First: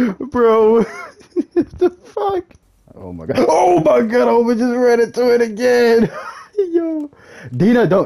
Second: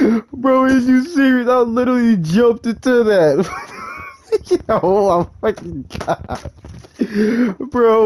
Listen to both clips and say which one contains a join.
first; 1 cut; at 2.6 s

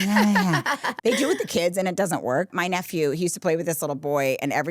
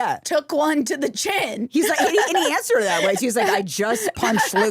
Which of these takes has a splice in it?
first; 2 cuts; at 0.9 s, 2.5 s

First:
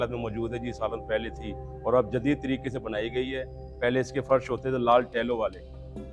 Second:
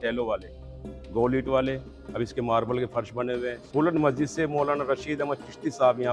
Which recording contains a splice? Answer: second; 1 cut; at 3.6 s

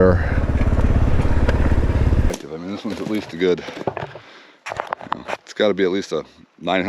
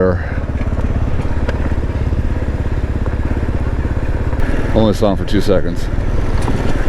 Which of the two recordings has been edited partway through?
first; 1 cut; at 2.3 s

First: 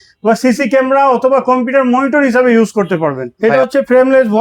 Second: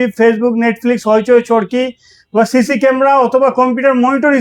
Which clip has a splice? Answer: first; 1 cut; at 3.2 s

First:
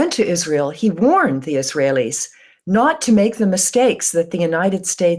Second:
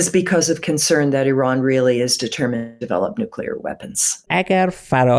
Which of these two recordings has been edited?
second; 1 cut; at 4.2 s

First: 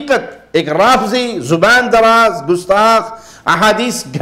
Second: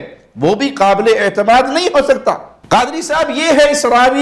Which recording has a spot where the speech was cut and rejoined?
second; 1 cut; at 2.5 s

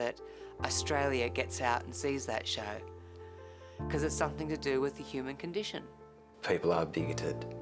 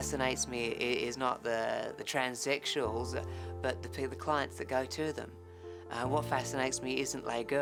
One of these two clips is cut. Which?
first; 2 cuts; at 3.2 s, 5.9 s

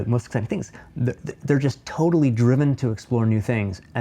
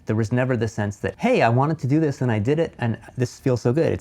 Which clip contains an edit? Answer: second; 2 cuts; at 1.1 s, 2.8 s

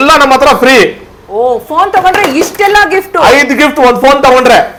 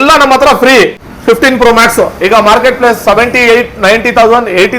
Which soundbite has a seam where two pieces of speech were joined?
second; 1 cut; at 1.1 s

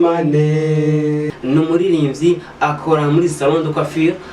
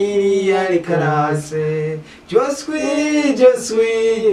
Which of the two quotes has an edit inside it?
first; 1 cut; at 1.3 s

